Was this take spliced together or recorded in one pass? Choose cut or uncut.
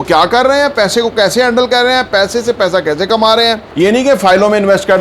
cut